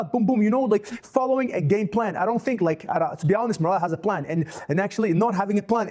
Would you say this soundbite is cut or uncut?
uncut